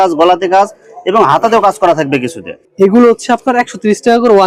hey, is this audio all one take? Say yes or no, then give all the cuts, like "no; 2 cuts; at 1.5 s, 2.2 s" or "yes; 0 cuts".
yes; 0 cuts